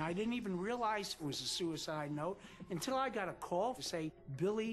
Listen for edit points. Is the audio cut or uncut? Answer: cut